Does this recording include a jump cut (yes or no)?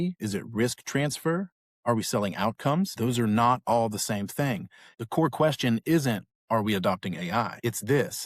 yes